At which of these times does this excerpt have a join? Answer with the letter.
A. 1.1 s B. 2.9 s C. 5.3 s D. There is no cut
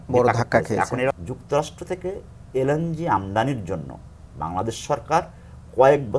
A